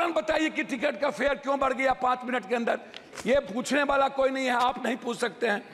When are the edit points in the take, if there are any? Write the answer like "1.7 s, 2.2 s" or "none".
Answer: none